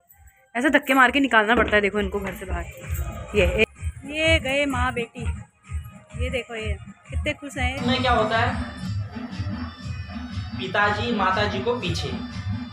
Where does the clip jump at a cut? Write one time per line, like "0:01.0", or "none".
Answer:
0:03.6
0:07.8